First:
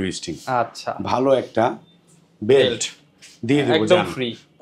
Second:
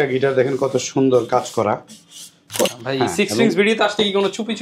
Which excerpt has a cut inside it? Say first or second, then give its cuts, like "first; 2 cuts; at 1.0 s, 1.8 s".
second; 1 cut; at 2.7 s